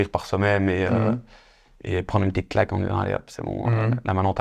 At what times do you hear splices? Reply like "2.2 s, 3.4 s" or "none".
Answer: none